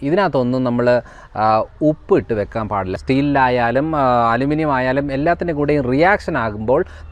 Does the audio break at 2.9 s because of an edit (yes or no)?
yes